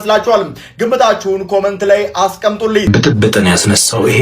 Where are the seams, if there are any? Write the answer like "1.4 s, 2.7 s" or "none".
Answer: 2.8 s